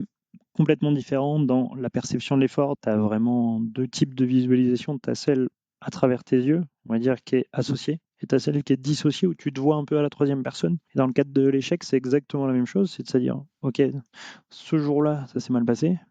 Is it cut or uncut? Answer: cut